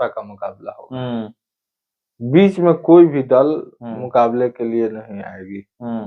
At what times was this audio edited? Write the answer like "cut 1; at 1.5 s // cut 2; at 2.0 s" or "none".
none